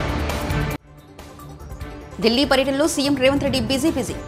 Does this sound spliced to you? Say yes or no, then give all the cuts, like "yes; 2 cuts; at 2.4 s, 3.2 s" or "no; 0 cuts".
yes; 1 cut; at 0.9 s